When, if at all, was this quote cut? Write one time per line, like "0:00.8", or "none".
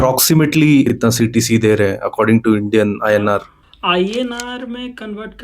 0:00.9
0:03.6